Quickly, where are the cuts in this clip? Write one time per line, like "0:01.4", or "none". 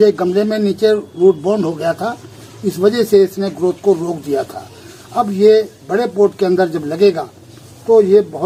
none